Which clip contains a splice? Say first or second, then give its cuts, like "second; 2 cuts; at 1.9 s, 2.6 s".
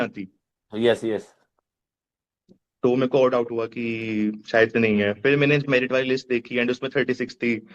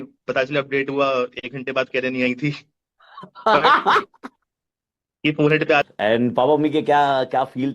second; 1 cut; at 5.9 s